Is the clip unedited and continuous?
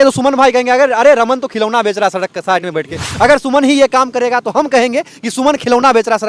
yes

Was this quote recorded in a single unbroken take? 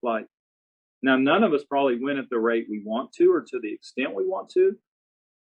yes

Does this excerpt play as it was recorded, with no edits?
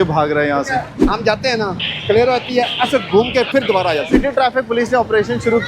no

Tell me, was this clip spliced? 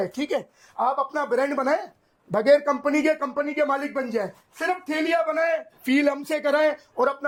no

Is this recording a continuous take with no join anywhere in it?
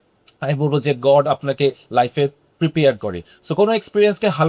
yes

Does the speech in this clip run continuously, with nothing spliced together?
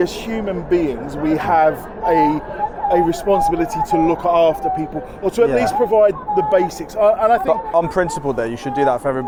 yes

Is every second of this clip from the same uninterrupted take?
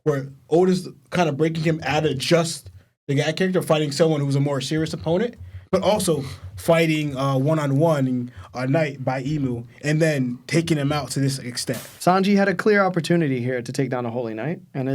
no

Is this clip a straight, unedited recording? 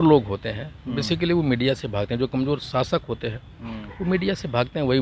yes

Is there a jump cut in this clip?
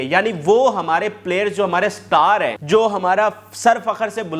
yes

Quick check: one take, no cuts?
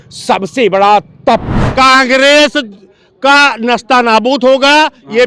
no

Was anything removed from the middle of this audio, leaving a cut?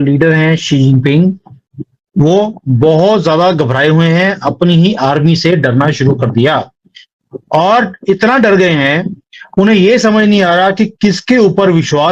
no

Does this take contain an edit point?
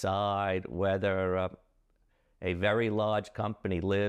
no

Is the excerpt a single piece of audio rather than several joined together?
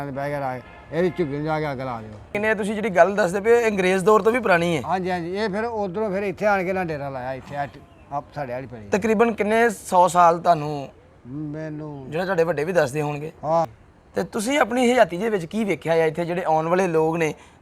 no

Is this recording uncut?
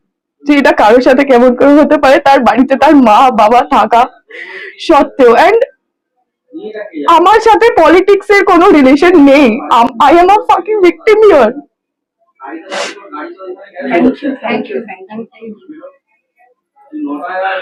yes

